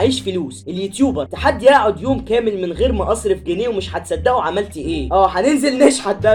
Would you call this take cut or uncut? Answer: uncut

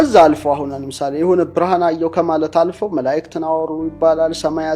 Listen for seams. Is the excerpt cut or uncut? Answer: uncut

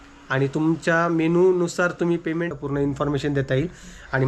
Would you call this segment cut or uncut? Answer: cut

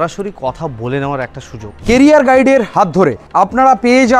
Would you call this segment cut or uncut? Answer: cut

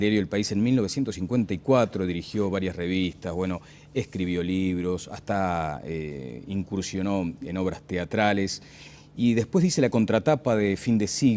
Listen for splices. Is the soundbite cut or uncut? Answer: cut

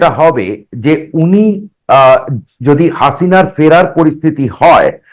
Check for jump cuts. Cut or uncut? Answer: uncut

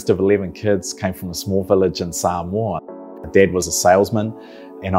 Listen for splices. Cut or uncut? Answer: cut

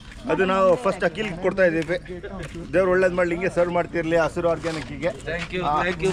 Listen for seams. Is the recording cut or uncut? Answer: uncut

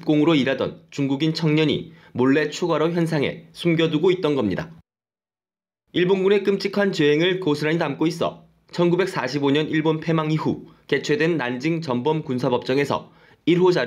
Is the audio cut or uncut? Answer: uncut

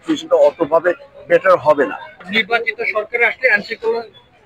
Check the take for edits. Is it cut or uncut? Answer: cut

